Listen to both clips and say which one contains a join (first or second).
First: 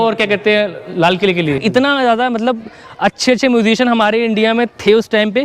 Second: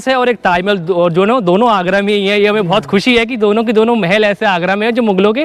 first